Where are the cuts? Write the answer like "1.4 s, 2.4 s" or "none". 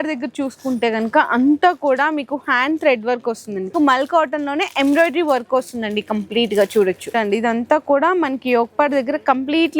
3.7 s, 7.1 s